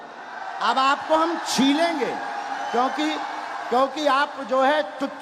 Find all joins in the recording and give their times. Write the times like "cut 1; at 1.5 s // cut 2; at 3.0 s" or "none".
none